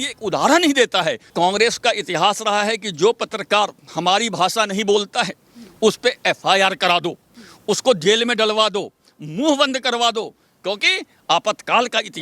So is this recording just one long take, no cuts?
no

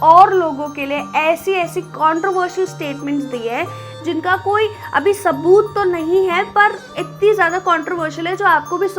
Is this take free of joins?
yes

